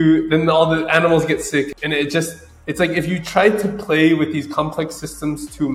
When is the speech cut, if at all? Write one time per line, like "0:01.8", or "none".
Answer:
none